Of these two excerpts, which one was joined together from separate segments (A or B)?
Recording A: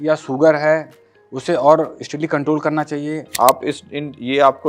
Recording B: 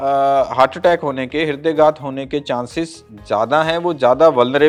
A